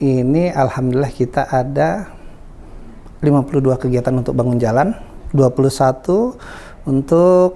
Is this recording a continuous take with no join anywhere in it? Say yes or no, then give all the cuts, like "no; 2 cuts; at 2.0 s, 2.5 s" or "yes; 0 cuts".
yes; 0 cuts